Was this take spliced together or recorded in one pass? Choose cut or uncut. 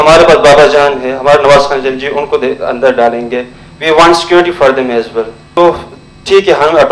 cut